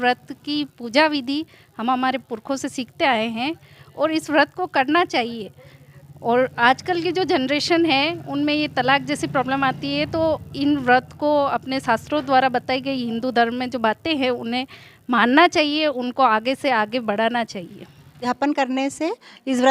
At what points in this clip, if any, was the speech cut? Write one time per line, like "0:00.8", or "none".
0:18.3